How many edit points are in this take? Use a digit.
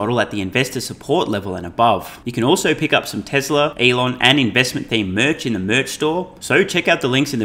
3